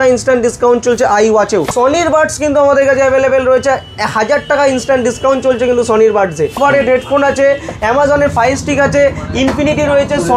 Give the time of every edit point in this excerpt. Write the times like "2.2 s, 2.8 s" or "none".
1.7 s, 6.6 s